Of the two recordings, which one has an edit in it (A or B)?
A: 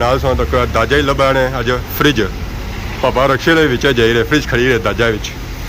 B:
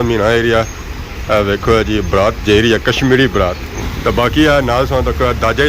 B